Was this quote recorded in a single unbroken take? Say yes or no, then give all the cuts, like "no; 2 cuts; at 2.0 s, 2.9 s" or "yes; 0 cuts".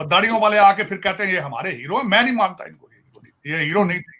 yes; 0 cuts